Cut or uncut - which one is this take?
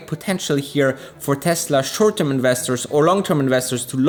uncut